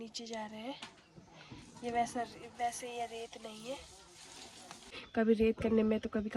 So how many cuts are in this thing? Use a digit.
1